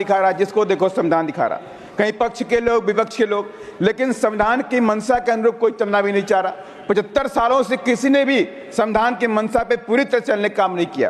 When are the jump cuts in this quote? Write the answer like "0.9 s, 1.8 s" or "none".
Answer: none

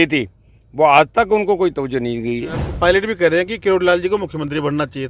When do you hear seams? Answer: 2.6 s

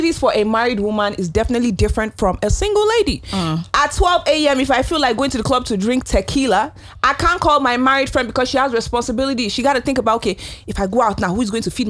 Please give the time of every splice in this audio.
none

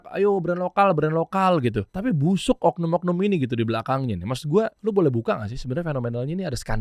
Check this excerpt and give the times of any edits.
1.9 s, 4.8 s

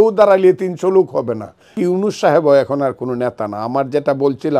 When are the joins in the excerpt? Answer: 1.7 s

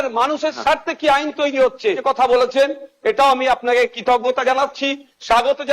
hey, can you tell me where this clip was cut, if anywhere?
2.0 s

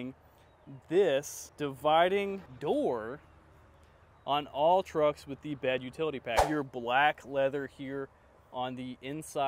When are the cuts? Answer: 1.4 s, 2.5 s, 6.4 s

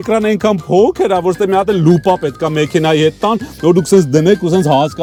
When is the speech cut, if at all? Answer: none

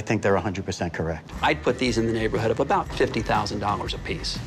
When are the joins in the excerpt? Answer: 1.3 s

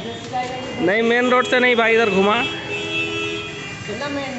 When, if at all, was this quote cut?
none

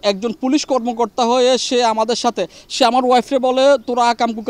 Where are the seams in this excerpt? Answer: none

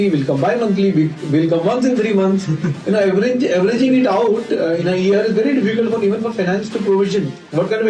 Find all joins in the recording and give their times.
none

